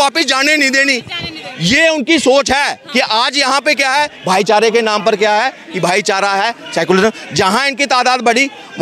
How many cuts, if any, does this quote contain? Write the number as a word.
zero